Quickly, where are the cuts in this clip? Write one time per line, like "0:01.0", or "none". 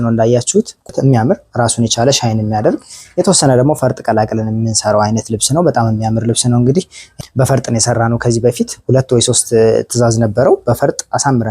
0:00.9
0:07.1

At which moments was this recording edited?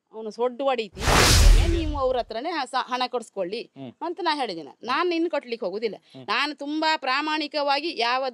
0:01.4

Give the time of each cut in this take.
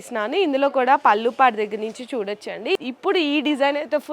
0:02.8

